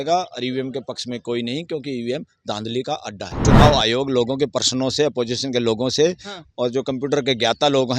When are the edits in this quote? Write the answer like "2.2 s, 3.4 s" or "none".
3.4 s